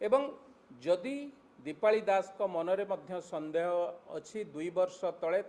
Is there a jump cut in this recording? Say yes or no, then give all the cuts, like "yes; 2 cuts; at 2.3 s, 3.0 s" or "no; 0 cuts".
no; 0 cuts